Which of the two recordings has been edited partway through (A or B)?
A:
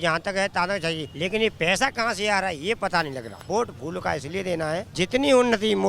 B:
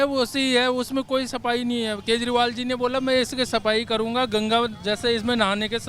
A